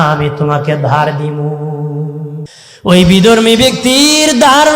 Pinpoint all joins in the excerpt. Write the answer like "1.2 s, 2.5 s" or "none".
2.5 s